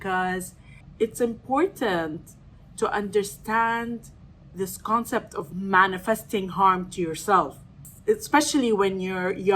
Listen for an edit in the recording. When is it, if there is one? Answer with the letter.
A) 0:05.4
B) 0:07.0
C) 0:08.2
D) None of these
A